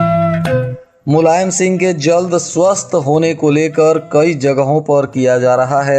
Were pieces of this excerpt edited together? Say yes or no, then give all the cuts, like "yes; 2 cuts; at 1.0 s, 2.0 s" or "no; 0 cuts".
yes; 1 cut; at 1.0 s